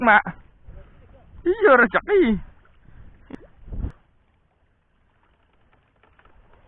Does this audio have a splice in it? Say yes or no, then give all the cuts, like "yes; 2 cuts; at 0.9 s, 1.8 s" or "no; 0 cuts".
yes; 1 cut; at 3.9 s